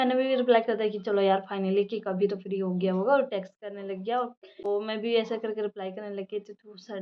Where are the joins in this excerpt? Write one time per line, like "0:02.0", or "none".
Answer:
none